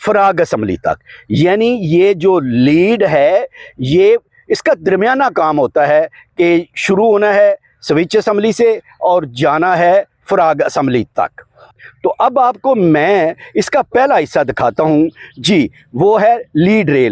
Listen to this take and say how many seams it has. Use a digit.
0